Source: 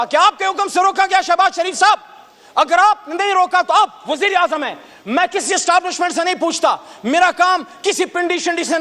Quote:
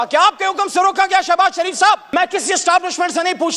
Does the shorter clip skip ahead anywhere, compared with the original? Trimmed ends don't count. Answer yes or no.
yes